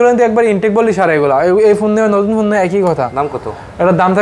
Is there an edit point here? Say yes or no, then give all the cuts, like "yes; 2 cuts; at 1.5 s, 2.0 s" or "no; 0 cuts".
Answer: no; 0 cuts